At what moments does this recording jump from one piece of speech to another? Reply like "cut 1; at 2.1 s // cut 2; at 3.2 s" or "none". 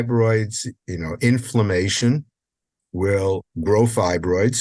cut 1; at 3.4 s